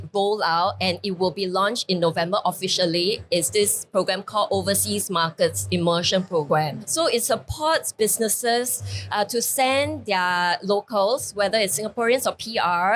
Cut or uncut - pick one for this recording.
uncut